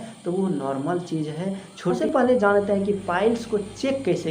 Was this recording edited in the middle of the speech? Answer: yes; 1 cut; at 2.0 s

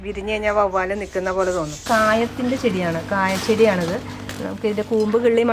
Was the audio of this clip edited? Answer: yes; 1 cut; at 1.8 s

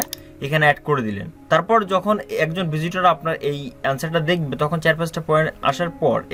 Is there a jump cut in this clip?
no; 0 cuts

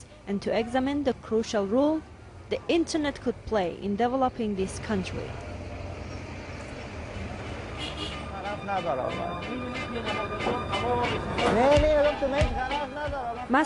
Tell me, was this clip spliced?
yes; 1 cut; at 9.4 s

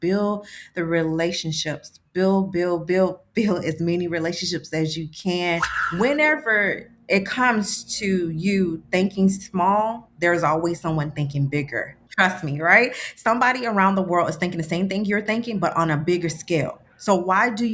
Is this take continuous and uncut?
no; 2 cuts; at 5.8 s, 12.0 s

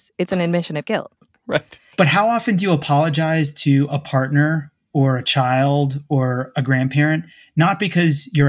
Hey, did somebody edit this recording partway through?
yes; 1 cut; at 1.9 s

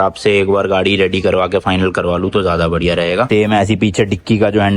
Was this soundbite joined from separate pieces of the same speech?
yes; 1 cut; at 3.3 s

